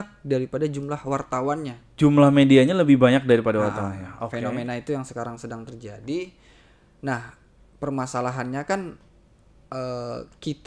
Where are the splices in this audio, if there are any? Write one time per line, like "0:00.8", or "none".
none